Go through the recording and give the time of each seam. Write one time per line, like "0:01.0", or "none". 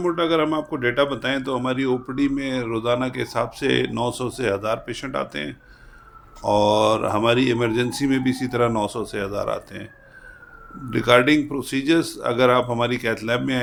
none

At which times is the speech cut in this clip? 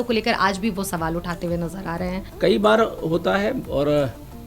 0:02.2

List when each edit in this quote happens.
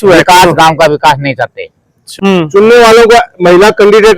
0:02.1

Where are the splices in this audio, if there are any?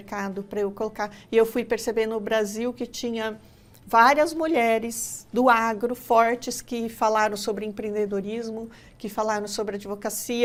none

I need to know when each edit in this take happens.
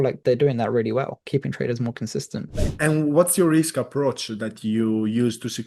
0:02.6

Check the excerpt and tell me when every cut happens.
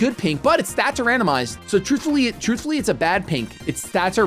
none

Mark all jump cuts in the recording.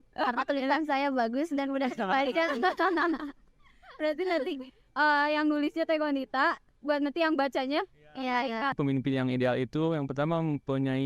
0:08.7

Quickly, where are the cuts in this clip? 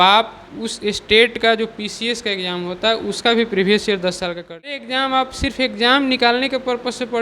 0:04.8

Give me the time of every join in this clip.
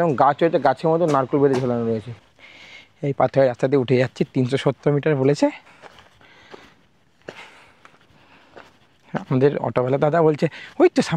0:02.1

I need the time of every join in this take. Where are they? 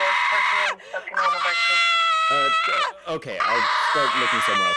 none

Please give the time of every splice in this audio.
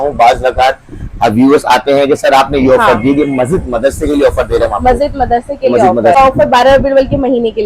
0:06.2

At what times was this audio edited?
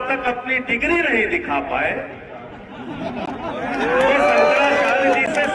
none

